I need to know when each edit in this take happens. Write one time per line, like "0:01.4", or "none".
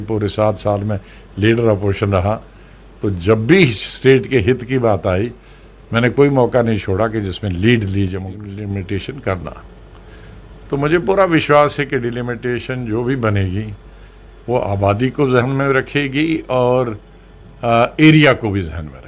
0:08.5